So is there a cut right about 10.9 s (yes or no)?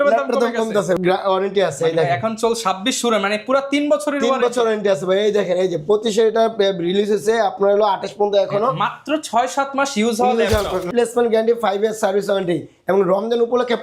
yes